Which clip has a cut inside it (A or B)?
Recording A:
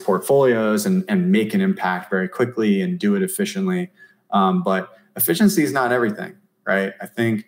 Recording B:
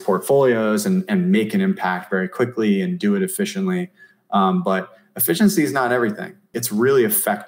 B